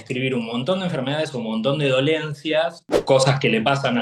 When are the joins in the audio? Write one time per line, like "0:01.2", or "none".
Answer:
0:02.9